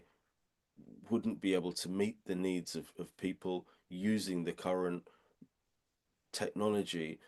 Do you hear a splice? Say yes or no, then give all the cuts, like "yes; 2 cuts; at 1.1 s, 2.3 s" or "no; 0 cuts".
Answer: no; 0 cuts